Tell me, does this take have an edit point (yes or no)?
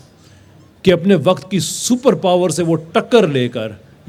no